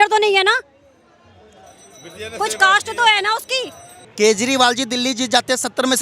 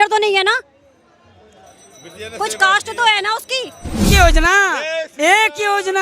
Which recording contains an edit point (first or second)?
second